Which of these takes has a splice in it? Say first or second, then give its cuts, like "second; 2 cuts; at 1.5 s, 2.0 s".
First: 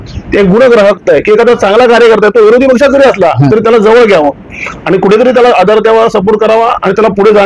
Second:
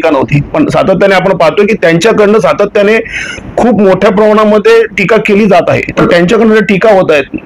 second; 1 cut; at 6.0 s